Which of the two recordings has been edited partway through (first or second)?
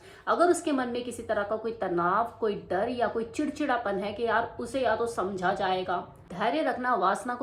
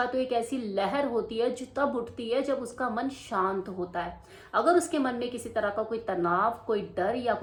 first